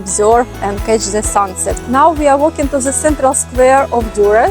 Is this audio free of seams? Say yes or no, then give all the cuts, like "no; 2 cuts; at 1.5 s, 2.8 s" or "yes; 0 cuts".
no; 1 cut; at 1.8 s